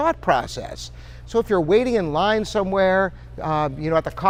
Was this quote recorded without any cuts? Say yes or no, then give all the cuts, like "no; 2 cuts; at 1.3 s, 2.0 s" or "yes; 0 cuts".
yes; 0 cuts